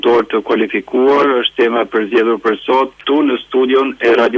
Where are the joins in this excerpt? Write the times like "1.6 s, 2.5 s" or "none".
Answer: 3.0 s